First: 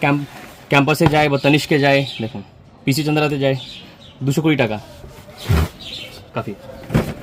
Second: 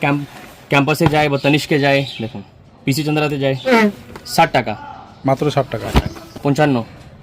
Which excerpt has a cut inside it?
second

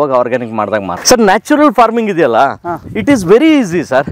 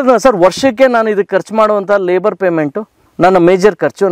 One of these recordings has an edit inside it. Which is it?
first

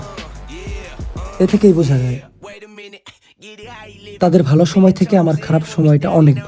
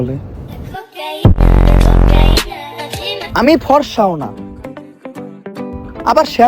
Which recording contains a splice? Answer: second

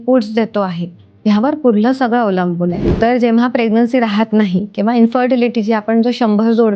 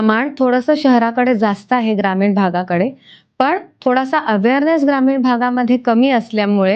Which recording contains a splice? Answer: first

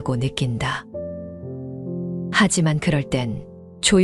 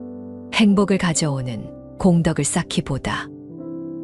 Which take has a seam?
first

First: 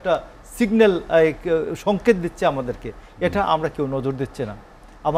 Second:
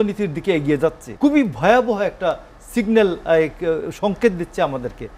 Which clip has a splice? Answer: second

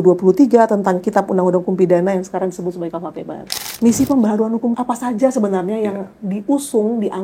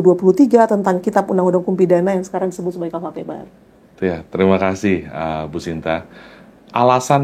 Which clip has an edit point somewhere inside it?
first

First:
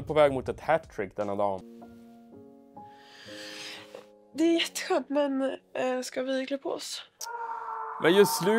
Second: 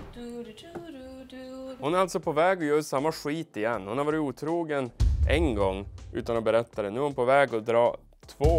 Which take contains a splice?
first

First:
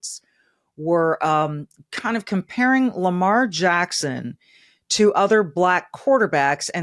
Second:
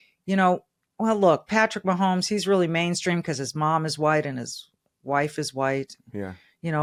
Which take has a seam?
first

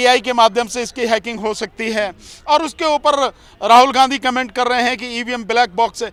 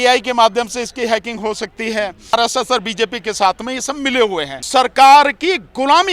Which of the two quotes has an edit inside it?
second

